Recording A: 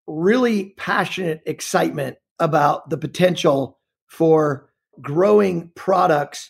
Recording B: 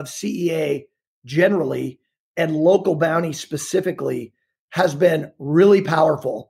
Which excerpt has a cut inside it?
A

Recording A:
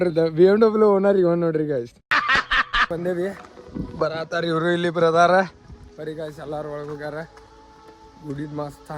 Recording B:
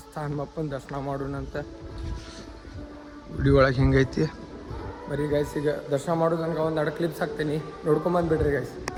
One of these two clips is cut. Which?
A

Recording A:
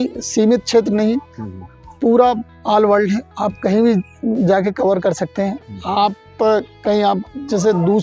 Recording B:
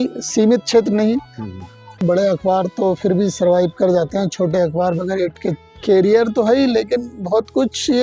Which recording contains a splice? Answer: B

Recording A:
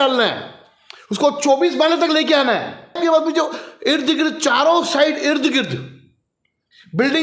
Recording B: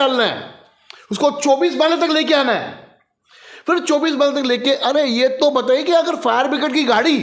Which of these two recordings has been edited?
A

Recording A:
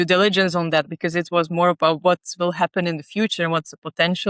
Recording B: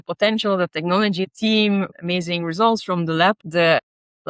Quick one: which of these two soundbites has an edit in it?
B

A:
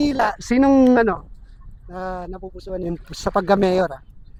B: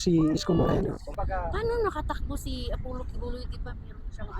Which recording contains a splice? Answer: B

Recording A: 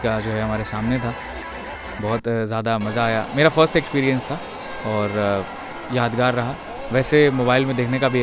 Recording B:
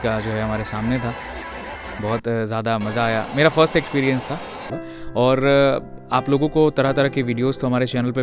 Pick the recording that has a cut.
B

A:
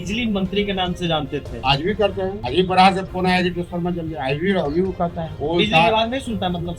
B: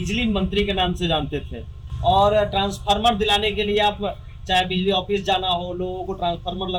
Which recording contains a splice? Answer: A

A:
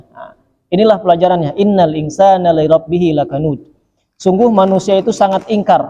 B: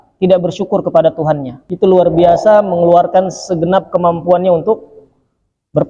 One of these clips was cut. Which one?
B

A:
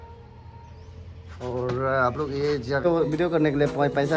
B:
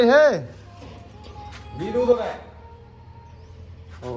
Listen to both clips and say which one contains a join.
A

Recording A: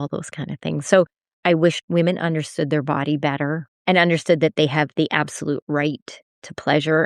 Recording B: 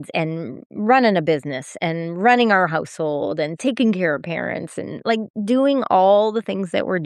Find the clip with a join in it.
A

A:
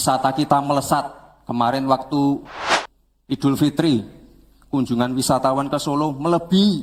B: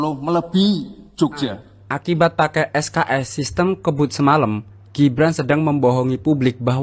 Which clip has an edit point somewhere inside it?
B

